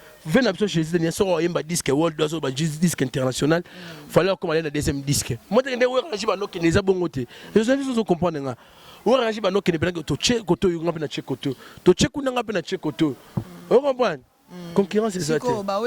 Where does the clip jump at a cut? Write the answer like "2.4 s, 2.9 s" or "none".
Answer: none